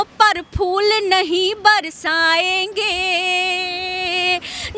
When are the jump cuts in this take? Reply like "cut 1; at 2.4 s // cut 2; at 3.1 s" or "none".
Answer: none